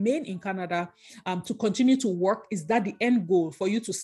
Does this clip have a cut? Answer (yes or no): no